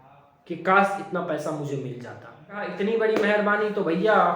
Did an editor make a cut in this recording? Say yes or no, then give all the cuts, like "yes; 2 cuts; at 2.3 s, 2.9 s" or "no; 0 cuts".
yes; 1 cut; at 2.7 s